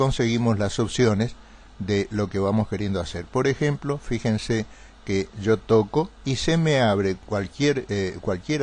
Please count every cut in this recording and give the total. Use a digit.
1